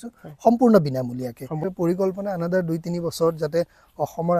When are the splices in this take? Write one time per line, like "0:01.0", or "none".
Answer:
0:01.5